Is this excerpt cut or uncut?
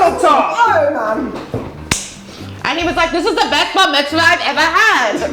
cut